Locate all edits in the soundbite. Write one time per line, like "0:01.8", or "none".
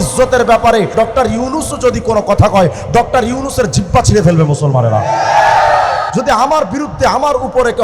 0:00.9
0:06.1